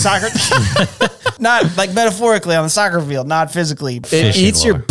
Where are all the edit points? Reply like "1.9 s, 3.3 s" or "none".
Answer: 1.3 s, 4.0 s